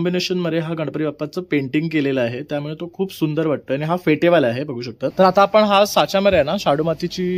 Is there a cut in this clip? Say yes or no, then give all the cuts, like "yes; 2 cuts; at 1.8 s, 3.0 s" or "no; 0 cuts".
yes; 1 cut; at 5.1 s